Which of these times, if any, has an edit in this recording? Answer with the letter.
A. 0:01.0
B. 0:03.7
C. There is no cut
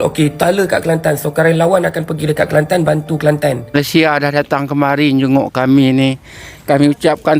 B